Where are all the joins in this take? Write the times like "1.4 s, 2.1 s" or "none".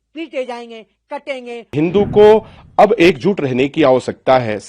1.7 s